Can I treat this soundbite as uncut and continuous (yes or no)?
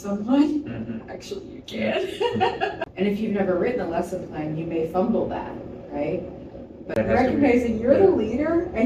no